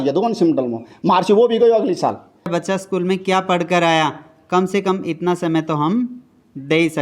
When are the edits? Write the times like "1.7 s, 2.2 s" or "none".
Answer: 2.5 s